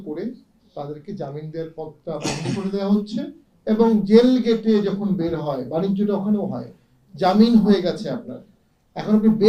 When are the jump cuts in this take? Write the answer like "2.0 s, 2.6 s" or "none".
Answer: none